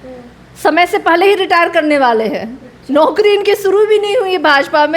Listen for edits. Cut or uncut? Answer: uncut